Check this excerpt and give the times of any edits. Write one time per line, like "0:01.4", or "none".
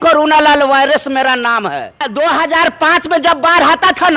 0:02.1